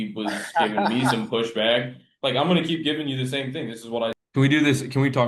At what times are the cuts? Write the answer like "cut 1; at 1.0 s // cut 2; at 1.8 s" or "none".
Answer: cut 1; at 4.2 s